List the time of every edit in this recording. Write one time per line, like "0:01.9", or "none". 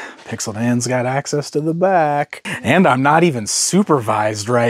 0:02.4

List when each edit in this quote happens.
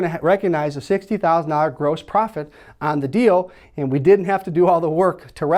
none

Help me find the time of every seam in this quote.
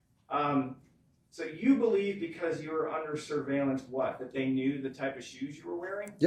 none

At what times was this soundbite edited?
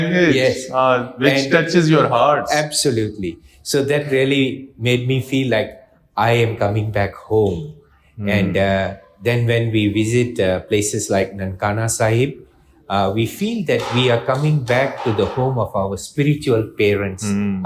none

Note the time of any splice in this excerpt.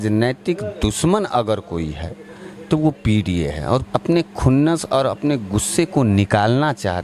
0:03.9

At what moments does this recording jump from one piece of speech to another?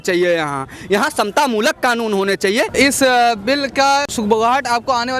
0:02.7
0:04.1

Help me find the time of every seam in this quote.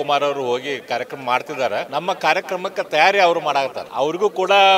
0:01.9
0:03.8

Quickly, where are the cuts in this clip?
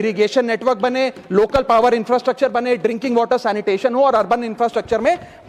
none

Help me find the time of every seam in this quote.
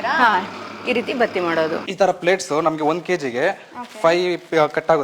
0:01.9

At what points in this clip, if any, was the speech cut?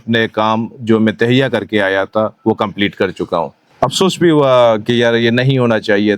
0:03.6

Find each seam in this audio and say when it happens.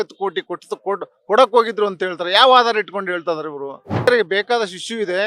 0:04.0

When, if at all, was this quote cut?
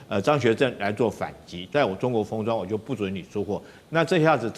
0:01.6

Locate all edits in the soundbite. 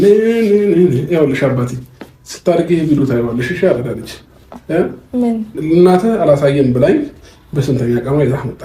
0:05.6

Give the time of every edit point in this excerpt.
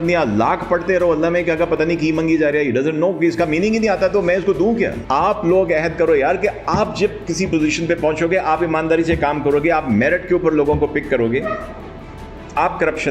0:05.0

